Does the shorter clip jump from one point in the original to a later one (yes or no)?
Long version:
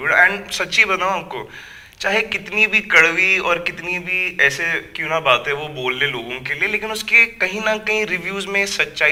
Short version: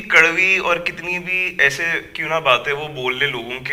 no